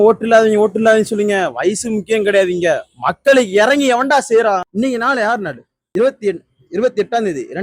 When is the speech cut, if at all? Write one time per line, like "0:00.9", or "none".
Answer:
0:04.7
0:05.7